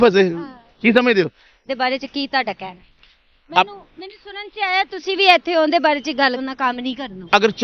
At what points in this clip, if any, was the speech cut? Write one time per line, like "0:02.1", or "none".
0:01.5
0:06.4